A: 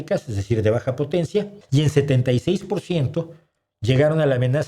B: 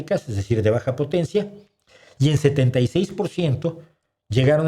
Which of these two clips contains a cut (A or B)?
A